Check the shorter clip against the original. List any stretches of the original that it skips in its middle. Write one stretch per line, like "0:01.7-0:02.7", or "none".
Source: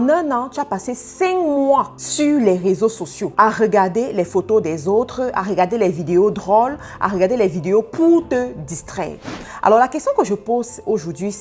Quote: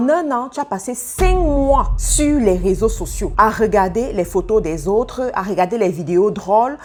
none